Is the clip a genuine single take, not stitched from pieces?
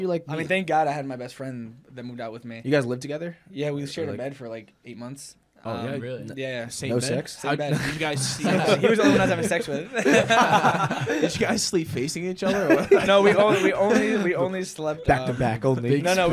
yes; 0 cuts

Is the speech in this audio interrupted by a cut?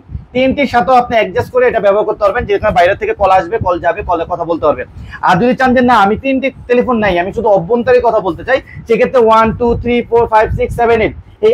no; 0 cuts

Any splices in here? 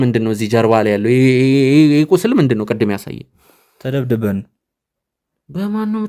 no; 0 cuts

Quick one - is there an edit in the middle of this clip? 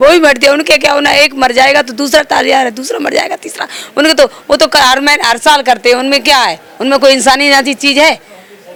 no; 0 cuts

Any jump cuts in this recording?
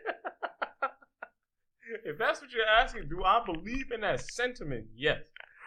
no; 0 cuts

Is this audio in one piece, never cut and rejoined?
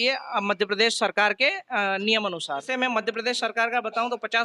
no; 1 cut; at 2.7 s

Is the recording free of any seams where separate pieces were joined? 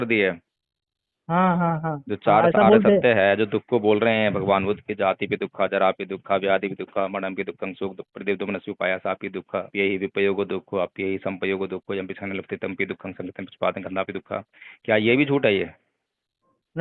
no; 1 cut; at 9.7 s

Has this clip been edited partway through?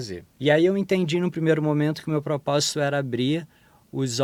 no; 0 cuts

